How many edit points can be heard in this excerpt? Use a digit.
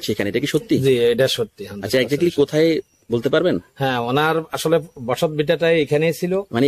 0